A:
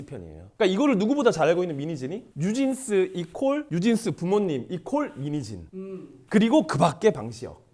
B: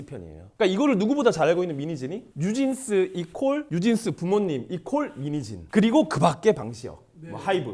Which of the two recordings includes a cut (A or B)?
B